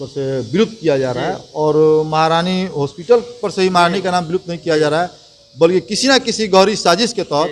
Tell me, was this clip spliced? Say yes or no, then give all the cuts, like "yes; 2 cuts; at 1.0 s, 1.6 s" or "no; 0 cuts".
no; 0 cuts